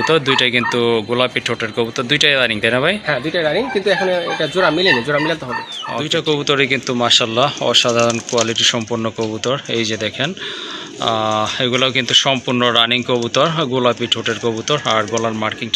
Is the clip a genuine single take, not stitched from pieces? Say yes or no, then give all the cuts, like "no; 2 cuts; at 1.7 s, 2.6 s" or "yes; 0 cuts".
no; 1 cut; at 6.1 s